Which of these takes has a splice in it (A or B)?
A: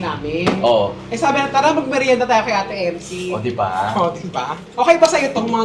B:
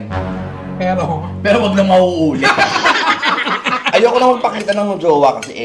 B